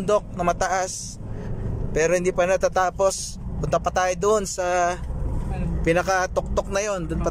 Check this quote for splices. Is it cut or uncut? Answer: uncut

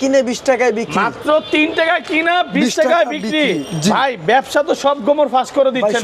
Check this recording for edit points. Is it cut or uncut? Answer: uncut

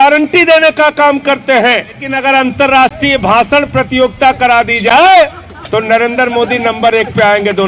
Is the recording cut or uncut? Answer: cut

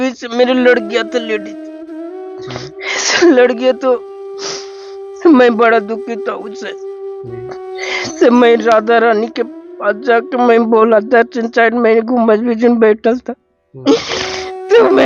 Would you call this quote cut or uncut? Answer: uncut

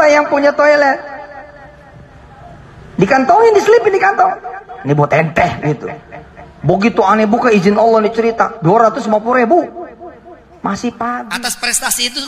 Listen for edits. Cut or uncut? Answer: cut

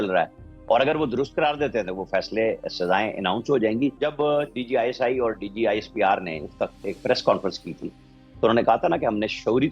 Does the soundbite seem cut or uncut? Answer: cut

